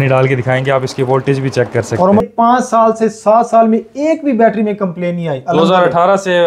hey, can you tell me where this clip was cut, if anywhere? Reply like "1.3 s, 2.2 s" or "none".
2.2 s